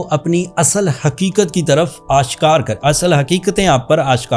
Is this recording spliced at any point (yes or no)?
no